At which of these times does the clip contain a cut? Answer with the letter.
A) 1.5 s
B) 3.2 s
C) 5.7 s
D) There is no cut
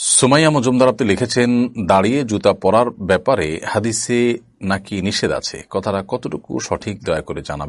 D